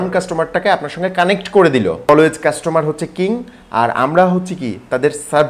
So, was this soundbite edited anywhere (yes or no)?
yes